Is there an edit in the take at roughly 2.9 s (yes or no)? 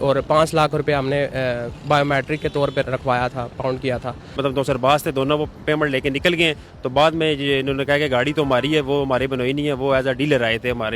yes